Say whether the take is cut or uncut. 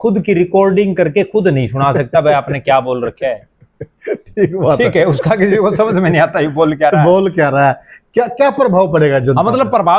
uncut